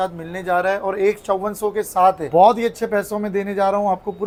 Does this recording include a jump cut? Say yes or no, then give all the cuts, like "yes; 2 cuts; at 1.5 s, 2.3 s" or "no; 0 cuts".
no; 0 cuts